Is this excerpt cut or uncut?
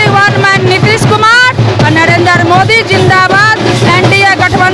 uncut